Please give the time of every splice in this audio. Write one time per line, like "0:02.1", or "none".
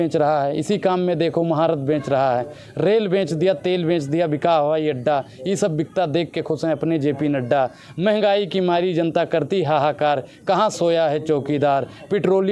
none